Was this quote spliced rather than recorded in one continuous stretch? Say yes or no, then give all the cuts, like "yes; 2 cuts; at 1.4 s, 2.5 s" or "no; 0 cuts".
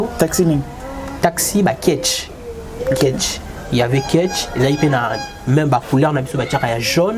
no; 0 cuts